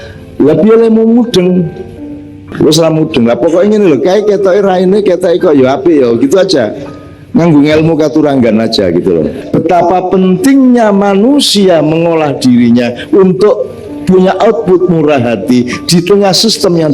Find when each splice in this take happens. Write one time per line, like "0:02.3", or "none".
0:02.4
0:09.6